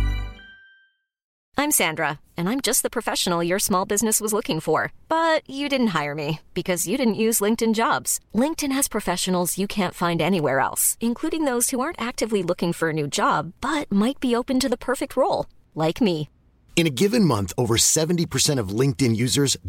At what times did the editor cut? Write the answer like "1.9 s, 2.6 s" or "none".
1.4 s